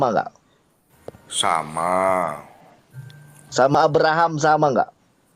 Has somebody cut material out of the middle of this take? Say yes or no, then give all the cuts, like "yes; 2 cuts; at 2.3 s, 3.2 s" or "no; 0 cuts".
no; 0 cuts